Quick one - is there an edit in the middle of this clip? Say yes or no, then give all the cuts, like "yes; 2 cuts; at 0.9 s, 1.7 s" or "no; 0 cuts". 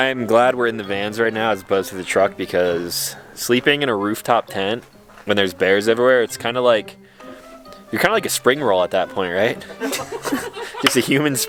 no; 0 cuts